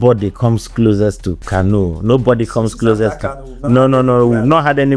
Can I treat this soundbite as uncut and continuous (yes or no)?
no